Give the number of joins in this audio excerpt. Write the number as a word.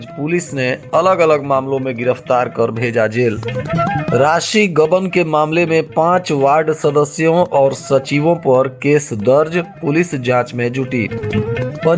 zero